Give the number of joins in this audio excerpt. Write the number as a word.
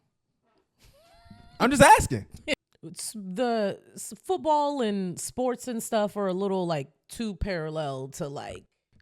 one